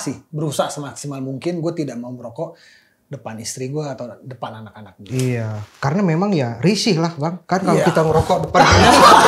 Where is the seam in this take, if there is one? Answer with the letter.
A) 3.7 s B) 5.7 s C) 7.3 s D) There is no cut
C